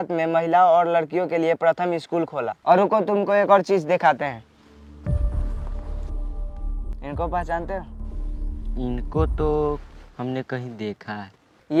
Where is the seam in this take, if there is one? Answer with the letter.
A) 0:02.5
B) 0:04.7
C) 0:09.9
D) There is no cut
D